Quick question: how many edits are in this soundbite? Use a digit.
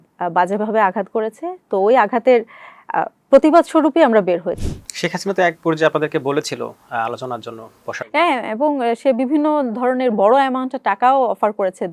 1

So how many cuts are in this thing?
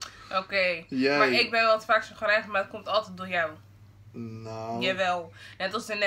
0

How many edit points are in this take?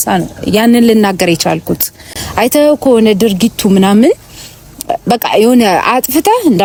0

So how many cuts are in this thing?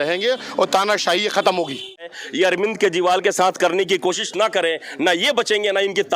1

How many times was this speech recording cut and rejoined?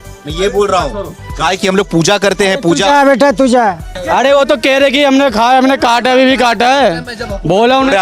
1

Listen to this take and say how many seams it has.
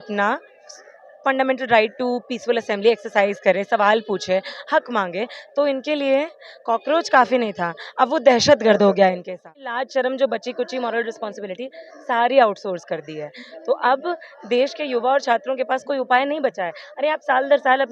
1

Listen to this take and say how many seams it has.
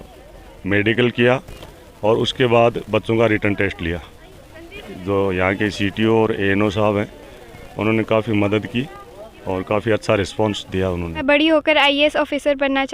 2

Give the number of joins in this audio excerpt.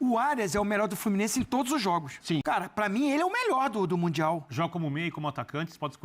1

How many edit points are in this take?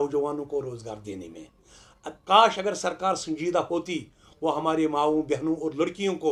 0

